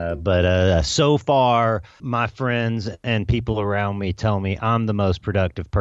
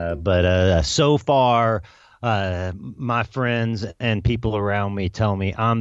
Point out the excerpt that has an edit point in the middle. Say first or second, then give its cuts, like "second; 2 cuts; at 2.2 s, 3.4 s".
first; 1 cut; at 1.9 s